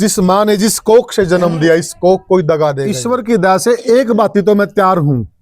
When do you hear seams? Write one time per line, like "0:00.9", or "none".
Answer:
0:03.0